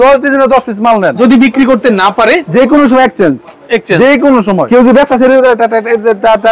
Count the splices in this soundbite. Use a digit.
3